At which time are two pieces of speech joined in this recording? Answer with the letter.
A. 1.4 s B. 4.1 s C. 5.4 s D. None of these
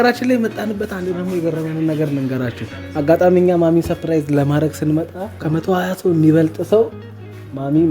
C